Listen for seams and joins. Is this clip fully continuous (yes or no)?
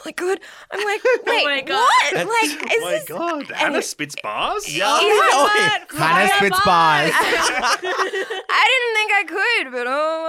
yes